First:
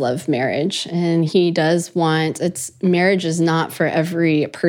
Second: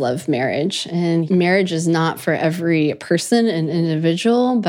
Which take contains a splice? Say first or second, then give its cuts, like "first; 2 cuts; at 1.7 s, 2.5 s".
second; 1 cut; at 1.3 s